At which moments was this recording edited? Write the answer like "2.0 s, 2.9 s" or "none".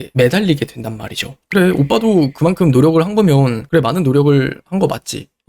1.4 s